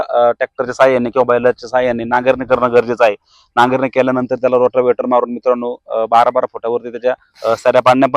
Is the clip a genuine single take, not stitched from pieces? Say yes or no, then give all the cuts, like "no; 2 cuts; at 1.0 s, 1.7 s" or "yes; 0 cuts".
yes; 0 cuts